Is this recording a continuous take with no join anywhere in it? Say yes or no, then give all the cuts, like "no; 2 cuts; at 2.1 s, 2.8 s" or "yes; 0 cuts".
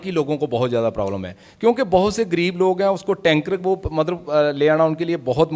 yes; 0 cuts